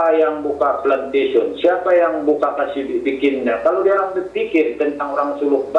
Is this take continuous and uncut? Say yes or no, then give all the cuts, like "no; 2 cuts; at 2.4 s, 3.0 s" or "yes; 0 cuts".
yes; 0 cuts